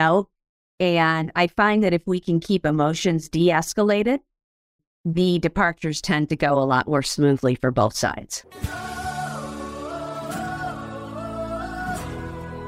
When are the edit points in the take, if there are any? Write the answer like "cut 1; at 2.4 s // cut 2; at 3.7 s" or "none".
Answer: cut 1; at 8.5 s